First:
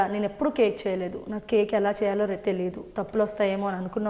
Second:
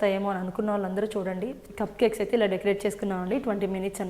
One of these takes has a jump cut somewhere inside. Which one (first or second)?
second